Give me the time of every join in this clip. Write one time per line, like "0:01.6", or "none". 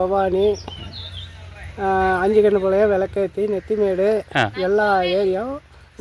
none